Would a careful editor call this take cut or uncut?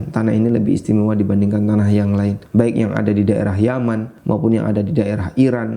cut